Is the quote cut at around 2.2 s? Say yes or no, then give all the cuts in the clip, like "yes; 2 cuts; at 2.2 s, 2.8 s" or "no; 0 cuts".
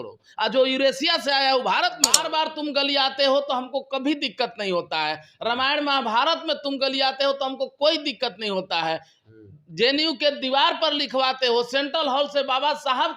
yes; 1 cut; at 2.2 s